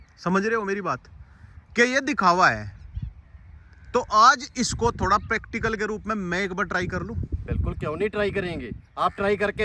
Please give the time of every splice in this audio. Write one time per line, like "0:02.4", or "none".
none